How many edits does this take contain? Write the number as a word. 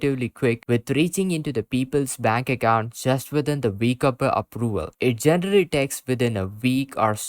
one